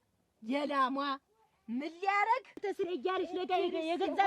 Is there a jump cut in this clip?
yes; 1 cut; at 2.6 s

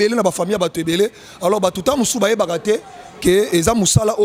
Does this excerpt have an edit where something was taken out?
no; 0 cuts

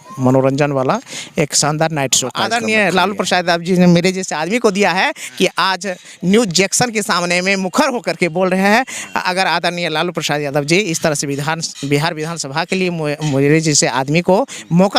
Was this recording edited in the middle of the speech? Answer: yes; 1 cut; at 2.4 s

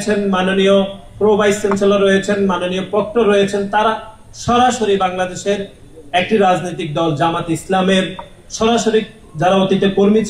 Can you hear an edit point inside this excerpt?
no; 0 cuts

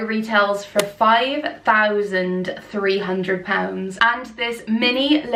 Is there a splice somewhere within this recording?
no; 0 cuts

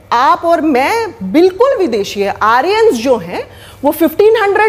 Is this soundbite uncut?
yes; 0 cuts

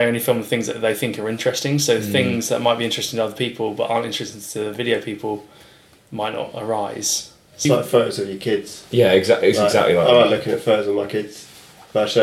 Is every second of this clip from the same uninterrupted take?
no; 1 cut; at 7.6 s

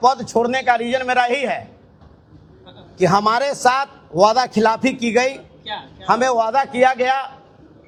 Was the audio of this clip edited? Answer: no; 0 cuts

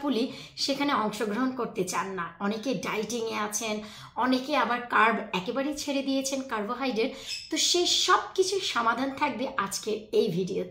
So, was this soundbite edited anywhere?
no; 0 cuts

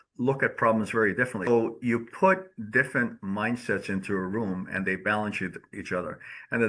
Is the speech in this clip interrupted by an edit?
yes; 1 cut; at 1.5 s

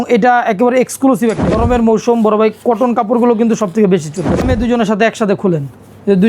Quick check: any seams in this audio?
yes; 2 cuts; at 1.6 s, 4.4 s

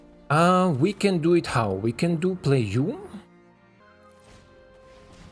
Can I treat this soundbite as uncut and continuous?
no; 1 cut; at 3.8 s

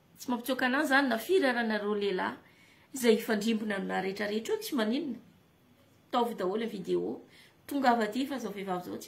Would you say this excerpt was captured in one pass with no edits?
yes; 0 cuts

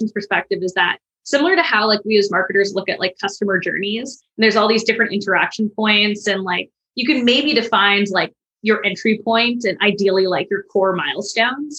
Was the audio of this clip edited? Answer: no; 0 cuts

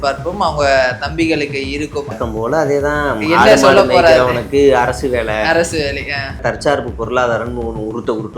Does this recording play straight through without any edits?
no; 2 cuts; at 2.1 s, 6.4 s

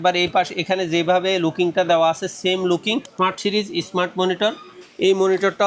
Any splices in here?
yes; 1 cut; at 3.1 s

